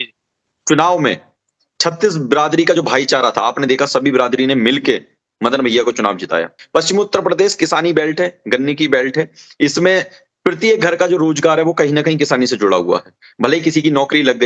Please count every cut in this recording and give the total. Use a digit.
1